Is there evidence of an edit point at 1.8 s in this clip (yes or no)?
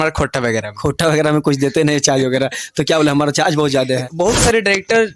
no